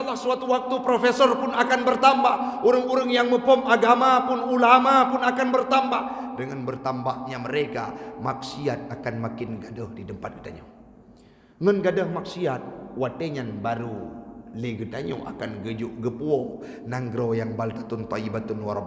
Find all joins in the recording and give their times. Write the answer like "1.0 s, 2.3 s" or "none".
none